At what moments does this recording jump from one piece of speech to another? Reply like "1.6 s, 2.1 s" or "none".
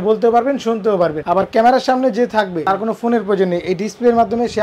1.2 s, 2.6 s